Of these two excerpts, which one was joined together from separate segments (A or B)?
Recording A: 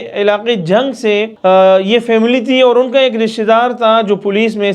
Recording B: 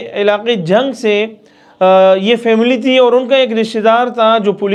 A